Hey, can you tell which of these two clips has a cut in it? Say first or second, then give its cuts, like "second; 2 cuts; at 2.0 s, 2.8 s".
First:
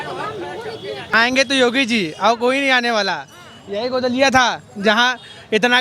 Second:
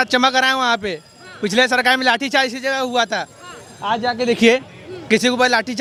first; 1 cut; at 1.1 s